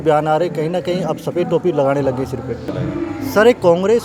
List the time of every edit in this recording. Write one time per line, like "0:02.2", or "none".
0:02.7